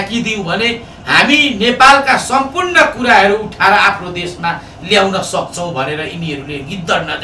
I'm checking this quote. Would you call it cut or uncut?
uncut